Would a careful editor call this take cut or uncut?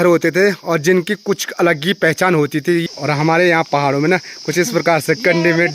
cut